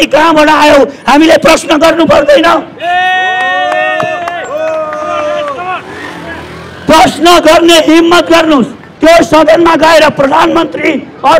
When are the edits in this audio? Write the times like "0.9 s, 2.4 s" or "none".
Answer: 8.8 s